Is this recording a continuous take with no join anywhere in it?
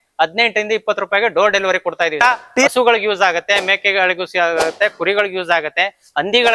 no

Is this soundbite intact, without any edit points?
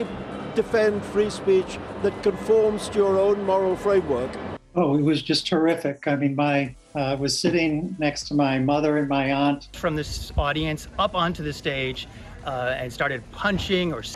yes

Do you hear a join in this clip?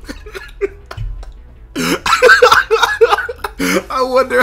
no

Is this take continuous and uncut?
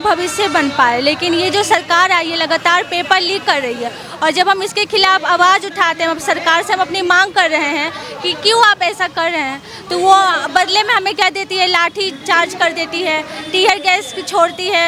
yes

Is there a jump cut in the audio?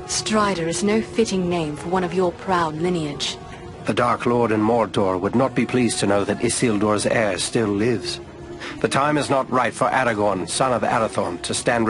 yes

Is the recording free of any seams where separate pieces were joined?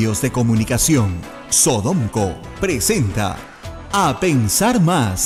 yes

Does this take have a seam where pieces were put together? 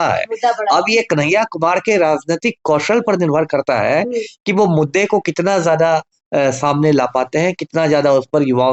no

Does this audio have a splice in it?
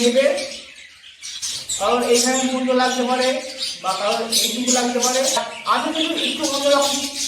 yes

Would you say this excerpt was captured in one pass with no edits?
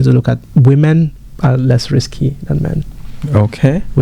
yes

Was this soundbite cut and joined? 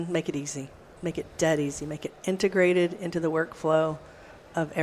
yes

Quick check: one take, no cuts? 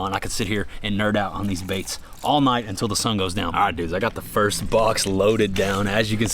no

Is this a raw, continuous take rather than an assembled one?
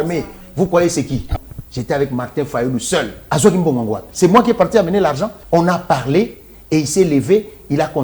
no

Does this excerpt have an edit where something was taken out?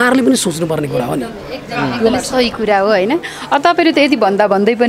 no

